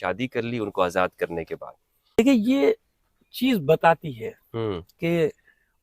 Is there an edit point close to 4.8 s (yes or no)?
no